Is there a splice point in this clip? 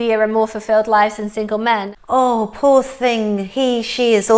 yes; 1 cut; at 1.9 s

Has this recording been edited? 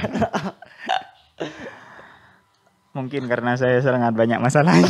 no; 0 cuts

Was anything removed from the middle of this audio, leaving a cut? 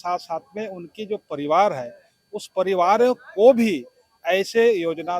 no; 0 cuts

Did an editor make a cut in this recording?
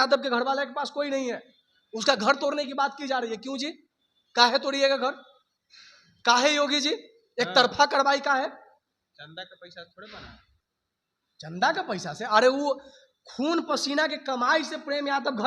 no; 0 cuts

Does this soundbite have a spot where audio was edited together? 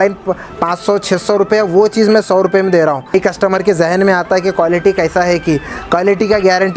yes; 1 cut; at 3.1 s

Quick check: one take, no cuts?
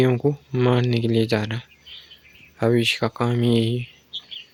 yes; 0 cuts

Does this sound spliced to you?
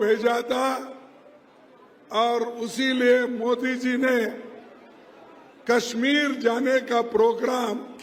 no; 0 cuts

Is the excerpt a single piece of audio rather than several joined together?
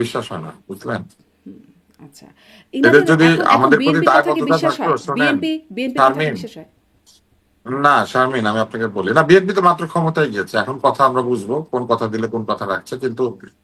yes; 0 cuts

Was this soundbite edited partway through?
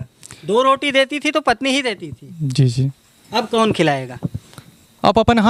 no; 0 cuts

